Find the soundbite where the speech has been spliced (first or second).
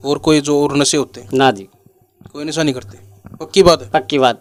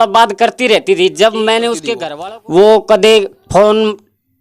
second